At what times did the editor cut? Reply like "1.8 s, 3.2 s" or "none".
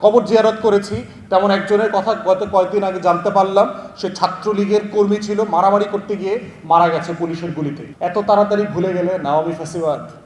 7.8 s